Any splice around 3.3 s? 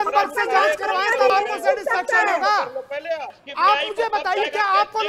yes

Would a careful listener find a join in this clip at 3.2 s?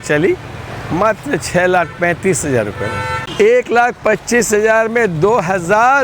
yes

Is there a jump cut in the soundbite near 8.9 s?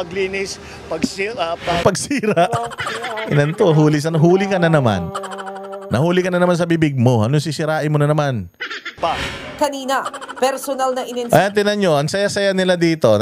yes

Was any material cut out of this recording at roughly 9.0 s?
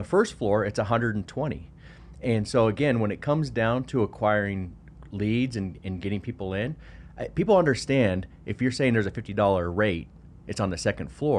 no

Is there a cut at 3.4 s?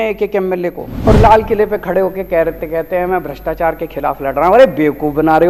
no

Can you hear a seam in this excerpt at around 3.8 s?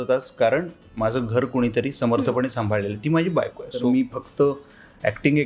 yes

